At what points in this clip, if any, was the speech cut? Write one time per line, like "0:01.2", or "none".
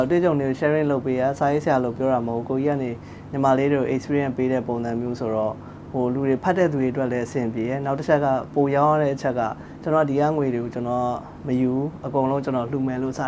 none